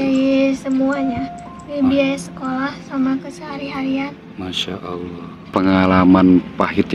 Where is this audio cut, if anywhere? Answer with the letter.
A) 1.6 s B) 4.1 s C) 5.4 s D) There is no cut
C